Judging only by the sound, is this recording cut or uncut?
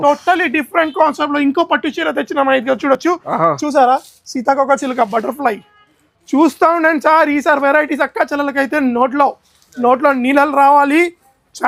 uncut